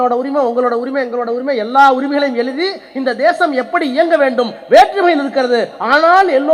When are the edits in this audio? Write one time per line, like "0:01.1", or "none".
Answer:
none